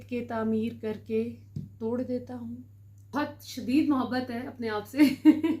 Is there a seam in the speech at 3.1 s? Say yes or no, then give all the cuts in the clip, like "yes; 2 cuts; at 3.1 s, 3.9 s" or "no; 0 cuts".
yes; 1 cut; at 3.1 s